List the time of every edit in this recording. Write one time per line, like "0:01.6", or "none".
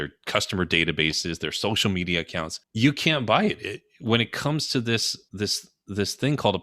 0:02.6
0:05.2